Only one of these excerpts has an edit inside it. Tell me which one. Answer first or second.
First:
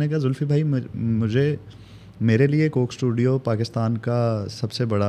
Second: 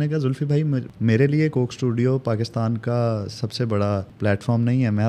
second